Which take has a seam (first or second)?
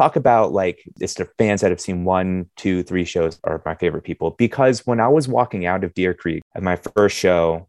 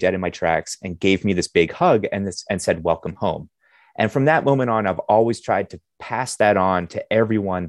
first